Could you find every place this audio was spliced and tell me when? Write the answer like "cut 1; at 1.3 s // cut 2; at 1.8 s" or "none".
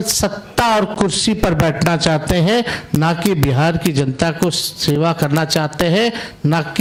none